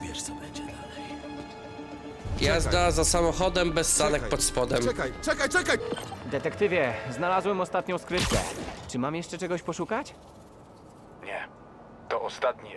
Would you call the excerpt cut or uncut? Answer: cut